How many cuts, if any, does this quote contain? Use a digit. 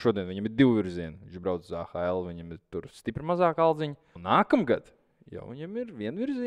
1